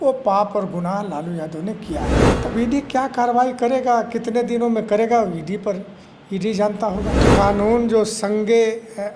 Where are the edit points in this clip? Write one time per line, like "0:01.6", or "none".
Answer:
0:02.2
0:07.2